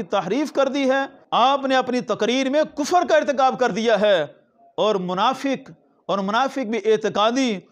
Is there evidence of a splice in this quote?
yes; 1 cut; at 1.2 s

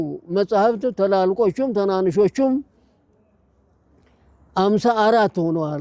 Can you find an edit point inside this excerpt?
no; 0 cuts

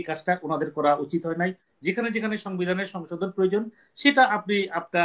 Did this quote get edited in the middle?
yes; 1 cut; at 1.7 s

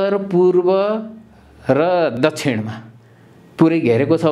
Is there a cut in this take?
yes; 1 cut; at 2.2 s

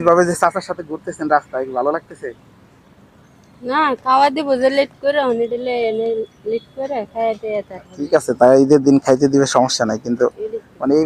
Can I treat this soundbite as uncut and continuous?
yes; 0 cuts

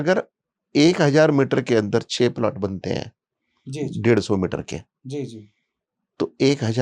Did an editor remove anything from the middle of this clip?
no; 0 cuts

